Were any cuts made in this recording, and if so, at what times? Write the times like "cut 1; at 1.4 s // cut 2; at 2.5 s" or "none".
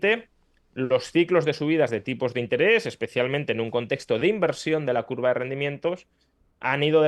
none